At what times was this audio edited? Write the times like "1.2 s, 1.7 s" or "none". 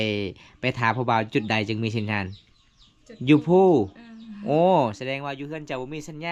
none